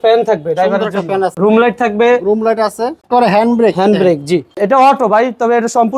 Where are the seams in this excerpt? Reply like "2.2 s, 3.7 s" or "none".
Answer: 1.3 s, 3.0 s, 4.6 s